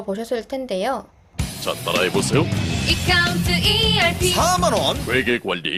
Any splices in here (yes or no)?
no